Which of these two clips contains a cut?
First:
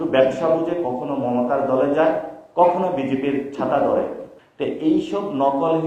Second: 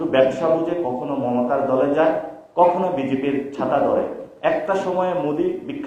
first; 1 cut; at 4.2 s

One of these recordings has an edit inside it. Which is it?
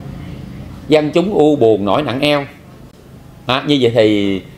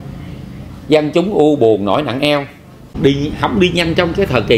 second; 1 cut; at 2.9 s

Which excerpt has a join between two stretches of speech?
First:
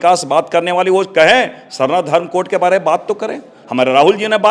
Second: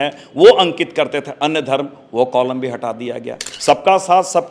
second; 1 cut; at 3.5 s

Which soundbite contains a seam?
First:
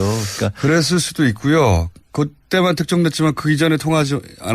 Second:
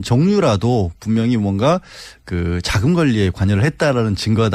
first; 1 cut; at 2.6 s

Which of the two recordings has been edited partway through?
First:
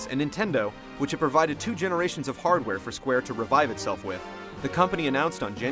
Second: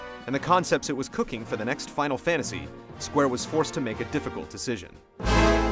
second; 1 cut; at 2.2 s

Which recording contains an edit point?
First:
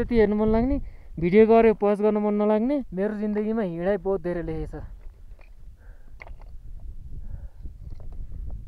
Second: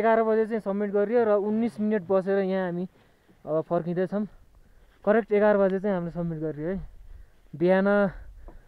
first; 1 cut; at 2.9 s

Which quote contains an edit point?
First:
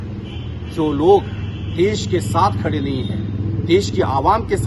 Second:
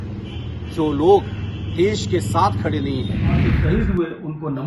second; 1 cut; at 3.5 s

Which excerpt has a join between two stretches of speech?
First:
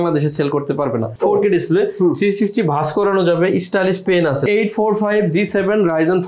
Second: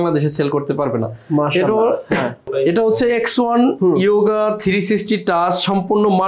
first; 2 cuts; at 1.1 s, 4.5 s

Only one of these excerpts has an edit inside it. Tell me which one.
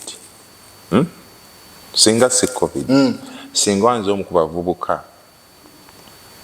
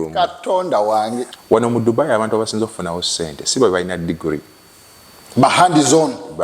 second; 1 cut; at 1.3 s

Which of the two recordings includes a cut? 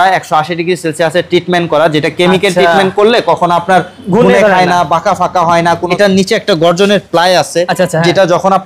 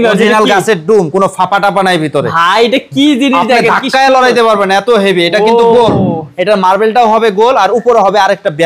first; 1 cut; at 5.9 s

